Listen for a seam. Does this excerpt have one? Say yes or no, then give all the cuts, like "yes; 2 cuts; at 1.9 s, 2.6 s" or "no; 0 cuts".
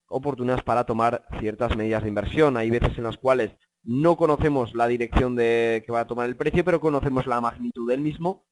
yes; 1 cut; at 3.0 s